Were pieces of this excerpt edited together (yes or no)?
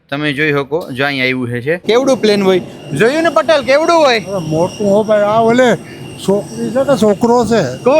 yes